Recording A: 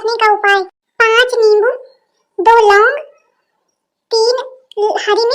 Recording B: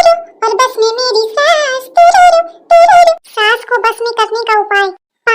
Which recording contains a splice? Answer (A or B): B